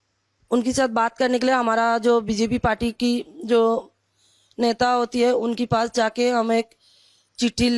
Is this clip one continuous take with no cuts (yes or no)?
yes